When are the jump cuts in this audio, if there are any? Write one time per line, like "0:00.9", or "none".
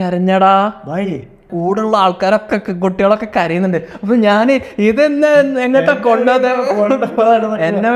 0:01.5